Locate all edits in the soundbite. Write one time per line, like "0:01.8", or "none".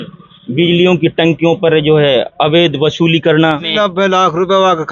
0:03.7